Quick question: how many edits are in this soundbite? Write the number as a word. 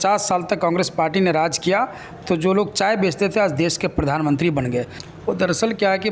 one